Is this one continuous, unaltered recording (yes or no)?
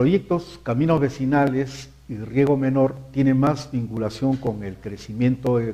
yes